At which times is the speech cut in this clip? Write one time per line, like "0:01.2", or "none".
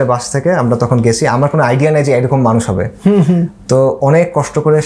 none